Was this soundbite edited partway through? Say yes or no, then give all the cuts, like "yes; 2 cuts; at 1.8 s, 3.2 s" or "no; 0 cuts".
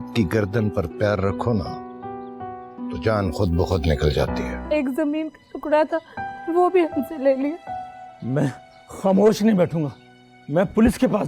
yes; 1 cut; at 4.6 s